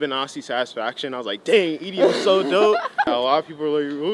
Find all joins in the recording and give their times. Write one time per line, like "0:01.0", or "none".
0:03.1